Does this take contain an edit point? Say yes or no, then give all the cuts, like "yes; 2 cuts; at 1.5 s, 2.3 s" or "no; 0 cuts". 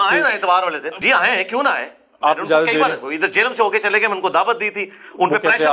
yes; 1 cut; at 1.0 s